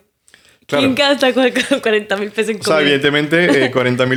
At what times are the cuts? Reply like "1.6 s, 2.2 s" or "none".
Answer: none